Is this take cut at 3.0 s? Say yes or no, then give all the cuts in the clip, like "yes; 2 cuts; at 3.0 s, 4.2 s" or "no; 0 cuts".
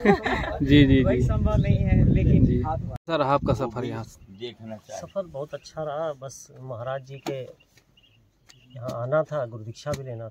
yes; 1 cut; at 3.0 s